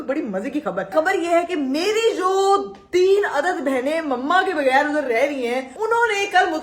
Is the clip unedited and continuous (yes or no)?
no